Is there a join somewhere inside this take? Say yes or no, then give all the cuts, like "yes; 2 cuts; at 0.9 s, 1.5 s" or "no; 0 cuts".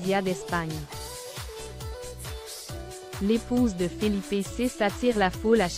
yes; 2 cuts; at 0.8 s, 3.0 s